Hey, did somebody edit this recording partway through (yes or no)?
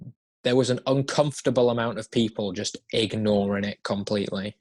no